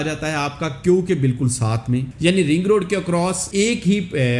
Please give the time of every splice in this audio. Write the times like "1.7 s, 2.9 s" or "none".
2.1 s, 3.4 s